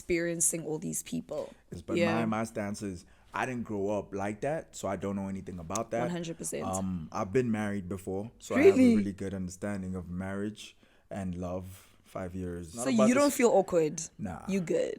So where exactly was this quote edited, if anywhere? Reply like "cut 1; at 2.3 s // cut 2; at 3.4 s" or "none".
cut 1; at 1.7 s // cut 2; at 12.8 s